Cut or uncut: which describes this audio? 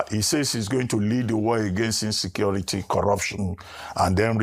uncut